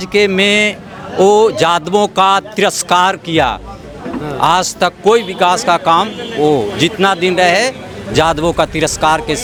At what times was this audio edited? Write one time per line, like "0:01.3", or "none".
none